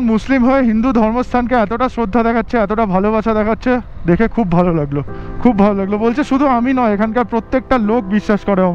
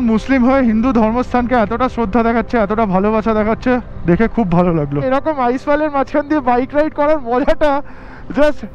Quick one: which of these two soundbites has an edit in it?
second; 1 cut; at 5.0 s

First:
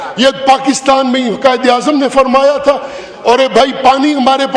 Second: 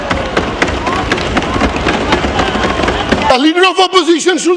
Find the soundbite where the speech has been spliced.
second; 1 cut; at 3.3 s

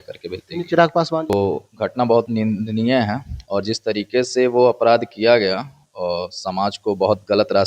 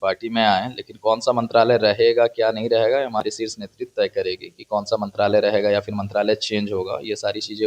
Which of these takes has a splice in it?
first; 1 cut; at 1.4 s

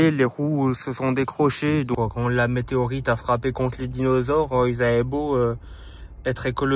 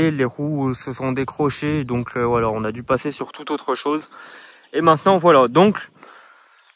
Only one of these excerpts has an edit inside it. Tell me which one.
first; 1 cut; at 1.9 s

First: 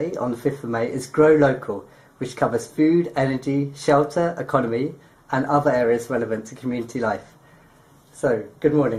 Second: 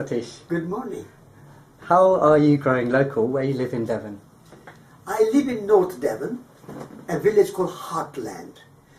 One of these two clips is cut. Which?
second; 1 cut; at 1.3 s

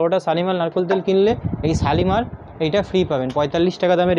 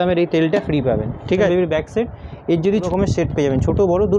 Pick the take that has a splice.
second; 2 cuts; at 1.5 s, 2.9 s

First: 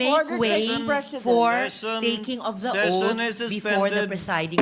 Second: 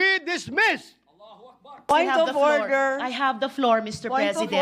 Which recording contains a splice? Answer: second; 1 cut; at 1.9 s

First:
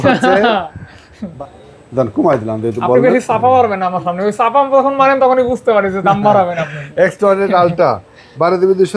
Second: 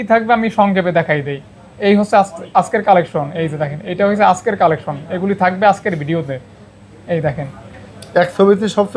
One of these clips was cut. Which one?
first; 1 cut; at 1.2 s

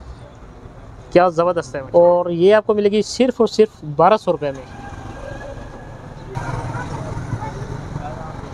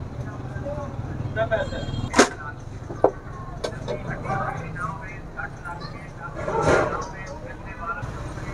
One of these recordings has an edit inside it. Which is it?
first; 2 cuts; at 1.7 s, 4.7 s

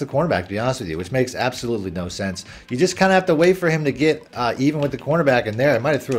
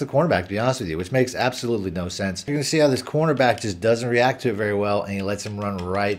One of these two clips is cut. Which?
second; 1 cut; at 2.6 s

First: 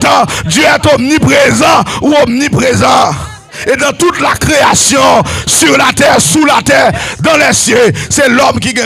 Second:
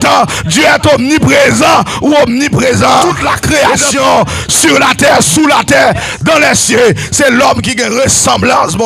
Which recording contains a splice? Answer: second; 1 cut; at 3.0 s

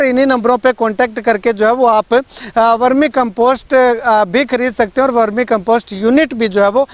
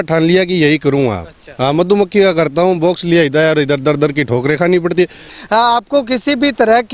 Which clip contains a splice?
second; 1 cut; at 5.3 s

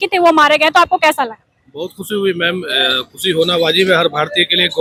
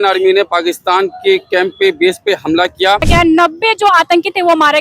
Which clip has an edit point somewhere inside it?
second; 1 cut; at 3.1 s

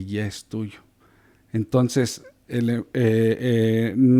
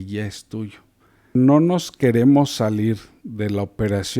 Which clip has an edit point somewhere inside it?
second; 1 cut; at 1.3 s

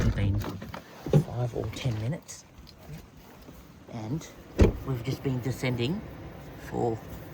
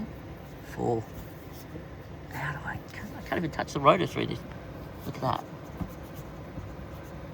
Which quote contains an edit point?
first; 1 cut; at 4.8 s

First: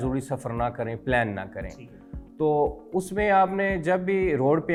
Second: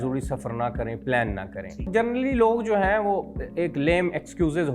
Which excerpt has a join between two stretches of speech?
second; 1 cut; at 1.9 s

